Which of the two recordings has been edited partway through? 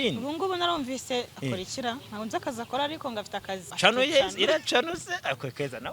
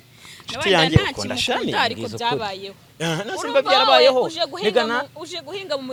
first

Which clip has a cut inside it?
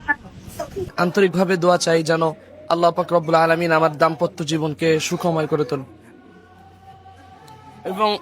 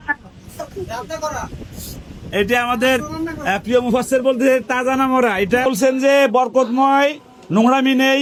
first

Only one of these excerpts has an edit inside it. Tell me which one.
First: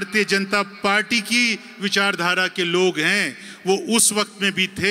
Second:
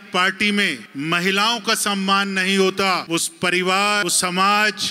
second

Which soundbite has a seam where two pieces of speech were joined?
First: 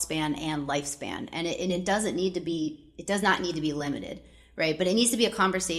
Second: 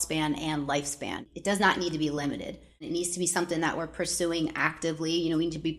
second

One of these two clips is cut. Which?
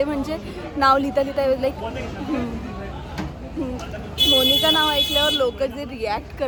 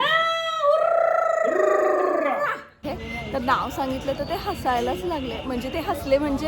second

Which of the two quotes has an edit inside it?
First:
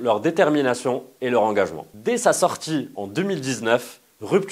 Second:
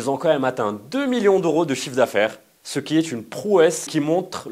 first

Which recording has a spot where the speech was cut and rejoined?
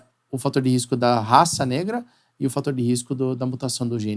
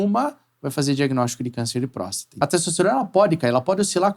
second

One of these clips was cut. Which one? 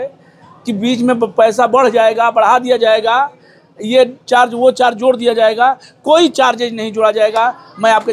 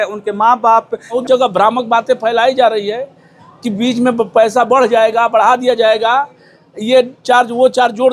second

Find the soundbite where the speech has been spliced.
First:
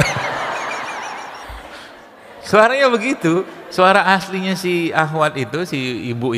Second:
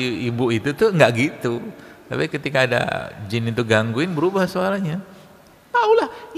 first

